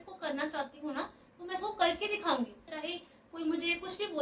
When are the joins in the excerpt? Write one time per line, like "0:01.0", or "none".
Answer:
0:02.7